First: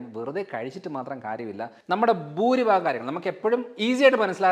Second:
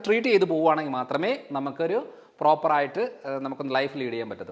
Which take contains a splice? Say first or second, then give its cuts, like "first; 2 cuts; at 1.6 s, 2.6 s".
first; 1 cut; at 1.8 s